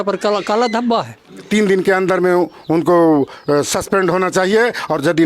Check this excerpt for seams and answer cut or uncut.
cut